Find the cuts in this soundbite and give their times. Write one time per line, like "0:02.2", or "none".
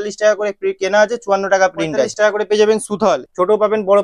0:02.1
0:03.2